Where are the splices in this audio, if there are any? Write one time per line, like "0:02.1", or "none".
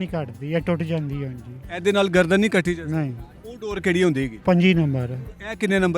0:04.3

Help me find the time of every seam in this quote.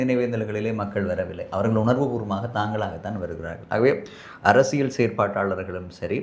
none

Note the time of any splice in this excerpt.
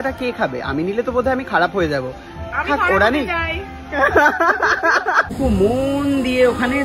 0:05.3

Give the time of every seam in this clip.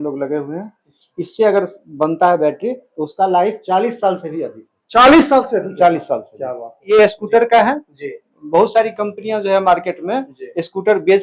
0:06.8

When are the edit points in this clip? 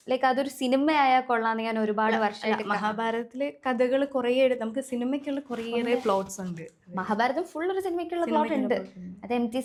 none

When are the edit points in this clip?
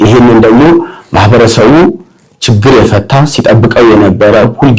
none

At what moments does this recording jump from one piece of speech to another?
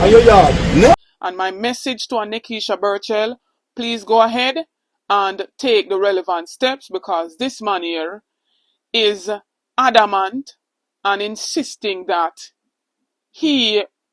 0:01.0

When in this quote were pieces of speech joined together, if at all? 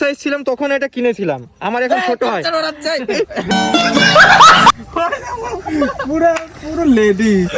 0:03.5
0:04.7
0:06.0

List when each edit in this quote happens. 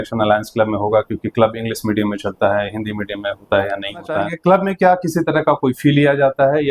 0:04.3

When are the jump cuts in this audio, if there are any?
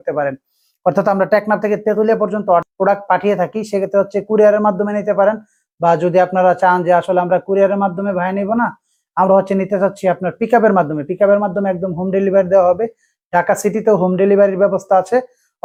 none

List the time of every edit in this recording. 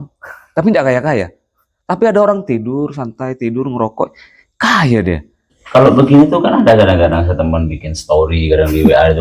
0:05.5

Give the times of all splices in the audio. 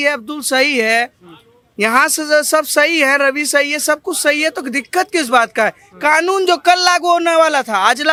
none

